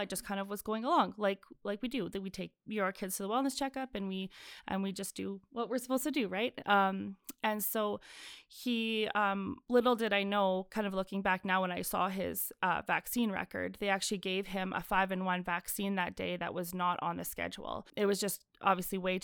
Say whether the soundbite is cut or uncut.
cut